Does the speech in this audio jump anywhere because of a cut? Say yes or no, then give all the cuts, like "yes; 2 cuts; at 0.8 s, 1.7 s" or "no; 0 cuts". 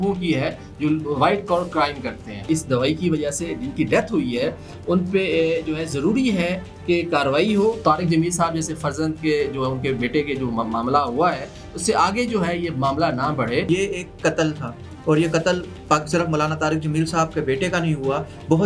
yes; 3 cuts; at 2.5 s, 7.8 s, 13.7 s